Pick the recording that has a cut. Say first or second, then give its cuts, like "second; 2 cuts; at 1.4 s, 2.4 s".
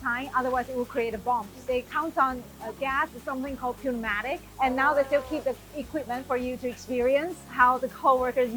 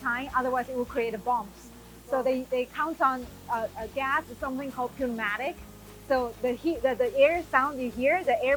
first; 4 cuts; at 1.6 s, 2.6 s, 4.5 s, 7.5 s